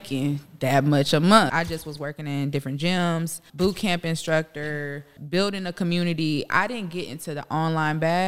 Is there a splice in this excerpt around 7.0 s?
no; 3 cuts; at 1.5 s, 3.5 s, 5.1 s

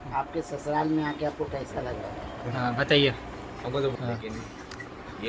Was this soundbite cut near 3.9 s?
yes; 1 cut; at 3.9 s

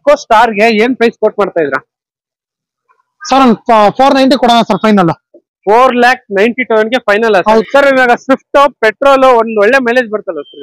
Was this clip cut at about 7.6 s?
yes; 1 cut; at 7.6 s

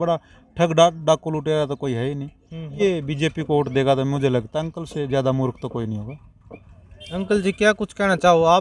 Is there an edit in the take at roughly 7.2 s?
no; 1 cut; at 2.8 s

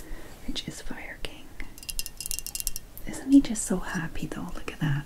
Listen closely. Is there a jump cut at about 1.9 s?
yes; 1 cut; at 1.9 s

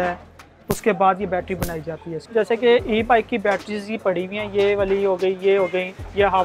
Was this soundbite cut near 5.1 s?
no; 1 cut; at 2.2 s

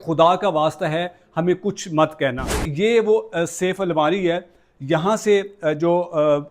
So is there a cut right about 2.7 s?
yes; 1 cut; at 2.7 s

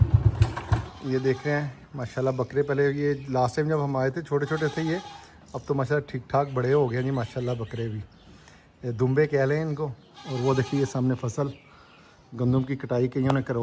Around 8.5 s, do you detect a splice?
no; 0 cuts

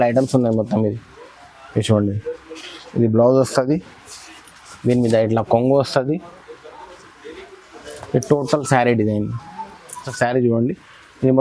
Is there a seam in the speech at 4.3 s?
no; 1 cut; at 10.1 s

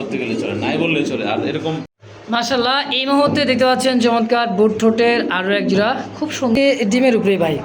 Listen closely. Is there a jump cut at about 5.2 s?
no; 2 cuts; at 2.0 s, 6.6 s

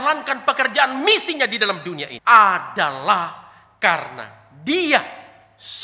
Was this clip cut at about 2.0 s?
yes; 1 cut; at 2.0 s

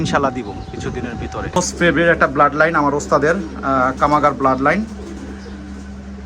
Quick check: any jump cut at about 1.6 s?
yes; 1 cut; at 1.6 s

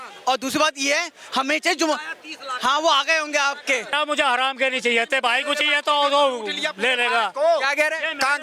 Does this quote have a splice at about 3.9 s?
yes; 1 cut; at 3.9 s

